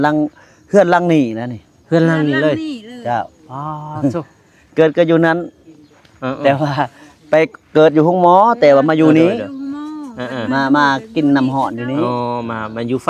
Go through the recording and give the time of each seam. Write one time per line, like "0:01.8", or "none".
none